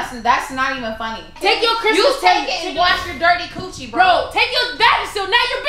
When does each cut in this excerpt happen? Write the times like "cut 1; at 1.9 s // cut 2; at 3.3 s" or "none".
cut 1; at 1.3 s

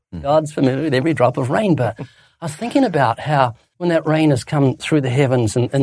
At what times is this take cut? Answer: cut 1; at 3.7 s

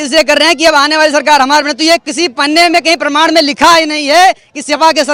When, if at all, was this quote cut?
none

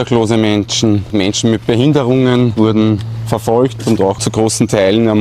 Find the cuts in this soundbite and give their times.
cut 1; at 1.1 s // cut 2; at 2.5 s // cut 3; at 4.2 s

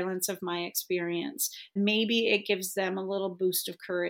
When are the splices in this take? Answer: cut 1; at 1.7 s

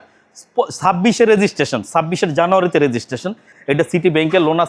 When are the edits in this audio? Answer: cut 1; at 3.5 s

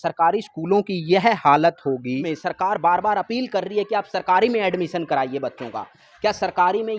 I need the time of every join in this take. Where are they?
cut 1; at 2.3 s

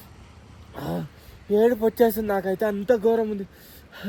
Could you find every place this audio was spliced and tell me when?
none

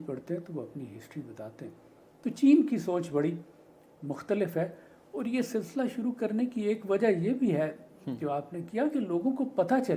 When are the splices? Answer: cut 1; at 2.0 s

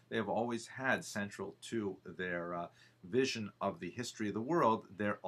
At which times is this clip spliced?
none

